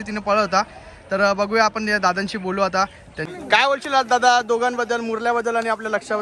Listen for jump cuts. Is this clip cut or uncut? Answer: cut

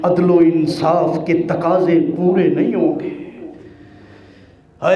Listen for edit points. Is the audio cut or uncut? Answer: uncut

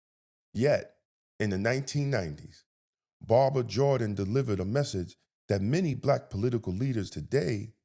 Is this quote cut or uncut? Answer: uncut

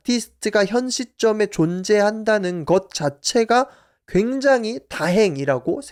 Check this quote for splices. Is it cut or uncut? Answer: uncut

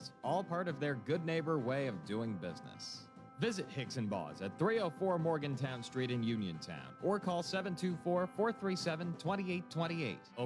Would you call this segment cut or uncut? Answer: uncut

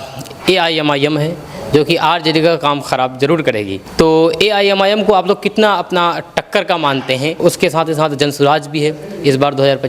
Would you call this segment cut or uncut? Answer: cut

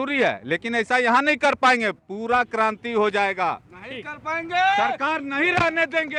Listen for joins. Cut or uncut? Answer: uncut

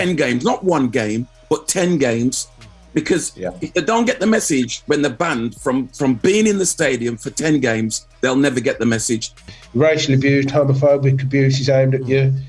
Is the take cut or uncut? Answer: cut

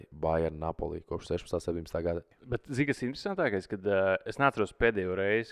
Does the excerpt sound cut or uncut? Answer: cut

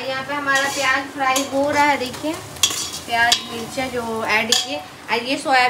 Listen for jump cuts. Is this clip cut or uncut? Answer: uncut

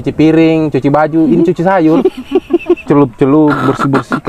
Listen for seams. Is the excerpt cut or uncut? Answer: uncut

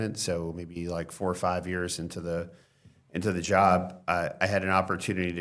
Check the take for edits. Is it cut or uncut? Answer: uncut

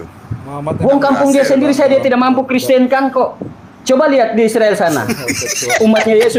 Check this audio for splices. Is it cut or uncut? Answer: uncut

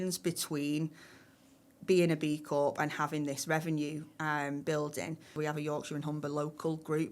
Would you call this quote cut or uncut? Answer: cut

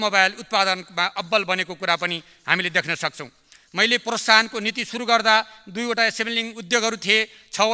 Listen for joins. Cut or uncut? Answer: uncut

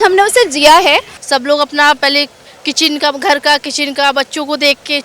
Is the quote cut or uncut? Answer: cut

